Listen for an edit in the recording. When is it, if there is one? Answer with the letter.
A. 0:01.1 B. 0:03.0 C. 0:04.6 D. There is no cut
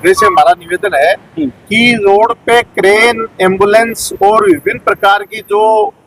D